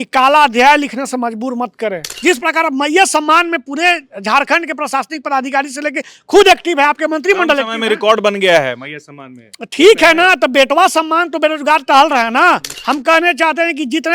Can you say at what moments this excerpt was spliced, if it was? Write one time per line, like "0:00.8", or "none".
0:02.1
0:12.7